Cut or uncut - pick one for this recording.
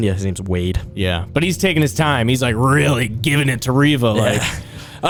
uncut